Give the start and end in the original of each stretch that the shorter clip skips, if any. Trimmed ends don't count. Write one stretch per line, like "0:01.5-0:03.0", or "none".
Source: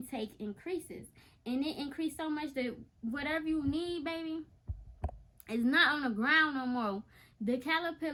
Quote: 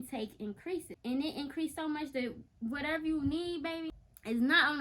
0:00.9-0:01.3
0:04.3-0:05.1